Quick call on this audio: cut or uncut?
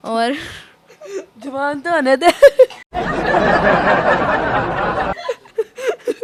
uncut